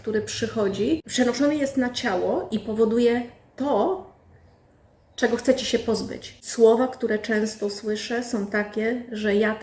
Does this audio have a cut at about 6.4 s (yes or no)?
yes